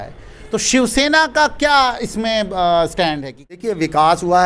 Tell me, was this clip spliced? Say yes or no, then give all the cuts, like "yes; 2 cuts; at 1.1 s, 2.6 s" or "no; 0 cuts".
yes; 1 cut; at 3.6 s